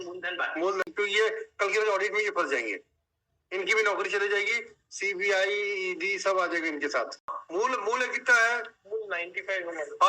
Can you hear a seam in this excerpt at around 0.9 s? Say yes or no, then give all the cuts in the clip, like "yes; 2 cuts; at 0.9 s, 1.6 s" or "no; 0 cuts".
yes; 2 cuts; at 0.9 s, 7.4 s